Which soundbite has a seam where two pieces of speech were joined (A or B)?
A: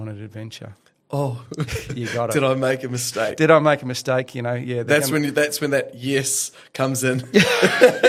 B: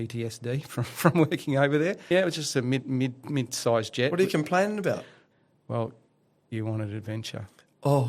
B